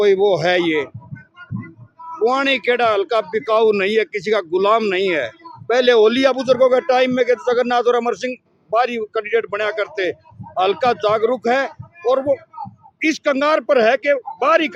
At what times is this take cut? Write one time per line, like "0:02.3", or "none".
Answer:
none